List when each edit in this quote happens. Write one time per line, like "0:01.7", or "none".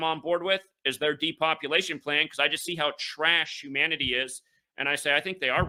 none